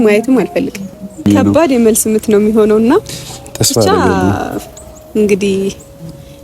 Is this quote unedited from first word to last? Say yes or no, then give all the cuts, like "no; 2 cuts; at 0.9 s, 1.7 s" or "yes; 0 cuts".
no; 1 cut; at 1.2 s